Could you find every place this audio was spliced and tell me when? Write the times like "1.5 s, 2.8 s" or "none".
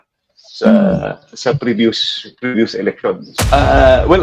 3.3 s